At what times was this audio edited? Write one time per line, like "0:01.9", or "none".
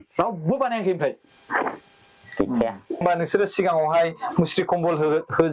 0:03.0